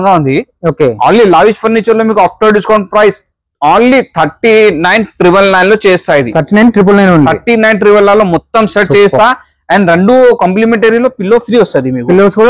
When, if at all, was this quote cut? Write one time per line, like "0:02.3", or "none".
none